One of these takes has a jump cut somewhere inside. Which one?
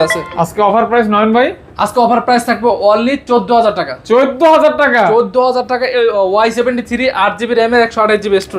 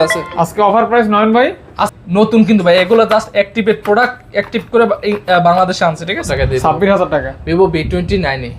second; 2 cuts; at 1.8 s, 6.3 s

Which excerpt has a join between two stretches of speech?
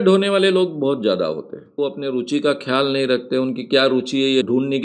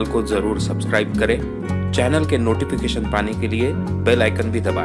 first; 1 cut; at 1.9 s

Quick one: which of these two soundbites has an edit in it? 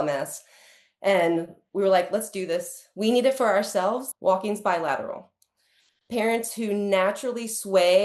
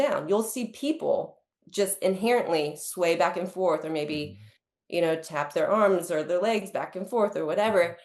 first; 1 cut; at 4.1 s

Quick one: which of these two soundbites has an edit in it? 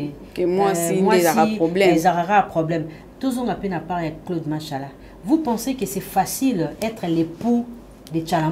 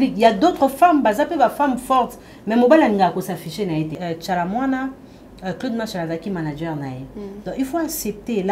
second; 1 cut; at 3.9 s

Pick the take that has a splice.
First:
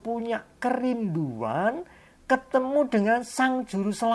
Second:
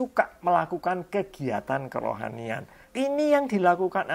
second; 1 cut; at 2.8 s

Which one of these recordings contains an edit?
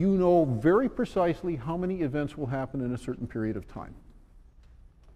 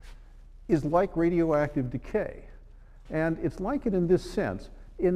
second; 1 cut; at 2.4 s

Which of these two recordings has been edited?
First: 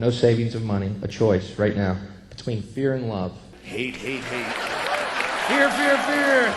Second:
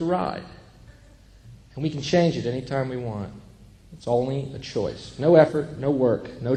first; 1 cut; at 3.5 s

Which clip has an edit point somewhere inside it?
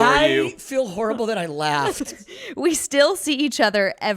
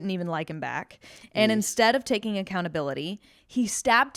first; 1 cut; at 2.1 s

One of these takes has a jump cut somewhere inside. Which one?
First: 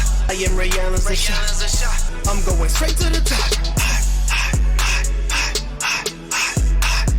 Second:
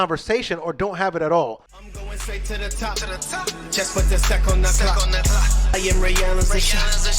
second; 1 cut; at 1.7 s

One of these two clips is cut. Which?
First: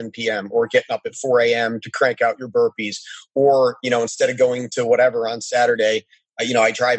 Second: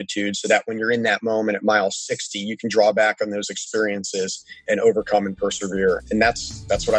second; 2 cuts; at 4.6 s, 6.0 s

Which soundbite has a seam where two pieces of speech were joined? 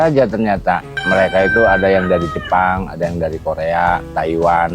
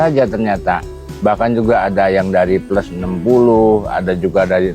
first; 1 cut; at 1.0 s

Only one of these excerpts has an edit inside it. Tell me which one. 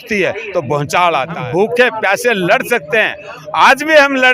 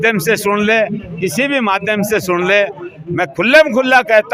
first; 1 cut; at 1.4 s

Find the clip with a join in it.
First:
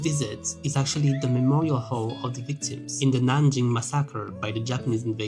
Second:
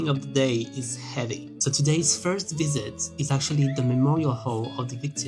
second; 1 cut; at 1.6 s

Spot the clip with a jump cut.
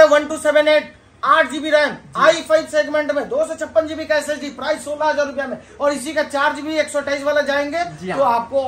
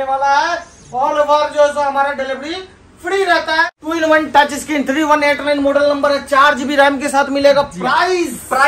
second; 1 cut; at 3.7 s

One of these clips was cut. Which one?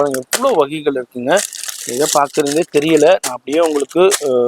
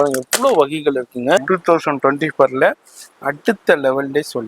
second; 1 cut; at 1.4 s

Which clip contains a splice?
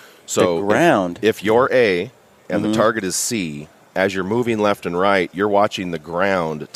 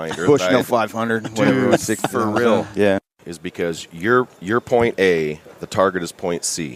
second; 1 cut; at 3.1 s

